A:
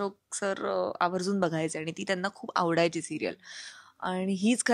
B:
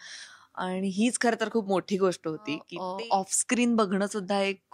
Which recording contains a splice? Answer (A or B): B